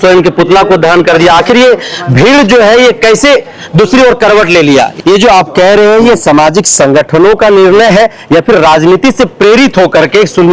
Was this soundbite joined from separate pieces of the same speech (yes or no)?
yes